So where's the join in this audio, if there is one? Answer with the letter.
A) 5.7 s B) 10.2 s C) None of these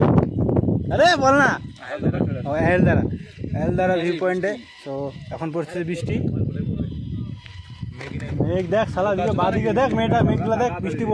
C